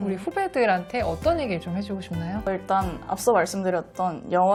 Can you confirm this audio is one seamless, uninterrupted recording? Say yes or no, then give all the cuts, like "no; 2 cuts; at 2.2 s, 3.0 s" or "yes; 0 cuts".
yes; 0 cuts